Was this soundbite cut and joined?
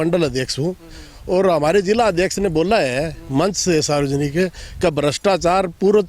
no; 0 cuts

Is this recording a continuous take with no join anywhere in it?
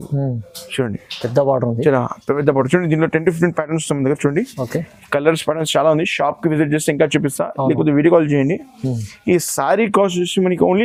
yes; 0 cuts

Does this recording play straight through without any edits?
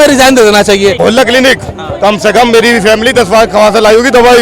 no; 1 cut; at 1.0 s

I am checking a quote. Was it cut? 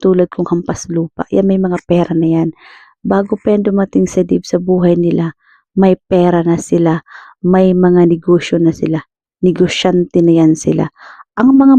no; 0 cuts

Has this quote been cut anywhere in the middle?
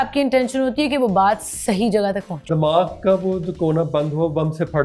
yes; 1 cut; at 2.4 s

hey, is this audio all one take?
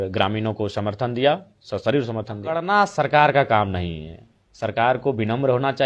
no; 1 cut; at 2.6 s

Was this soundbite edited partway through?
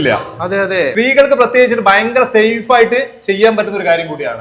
yes; 1 cut; at 0.9 s

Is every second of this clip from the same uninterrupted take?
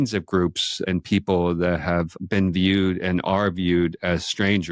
no; 2 cuts; at 0.8 s, 2.2 s

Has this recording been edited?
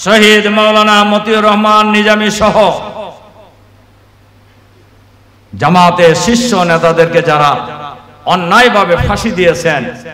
no; 0 cuts

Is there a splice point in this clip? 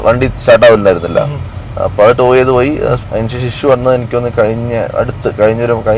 yes; 1 cut; at 3.0 s

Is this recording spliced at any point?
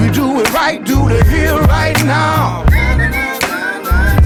no; 0 cuts

